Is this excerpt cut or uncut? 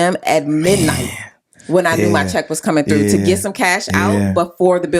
uncut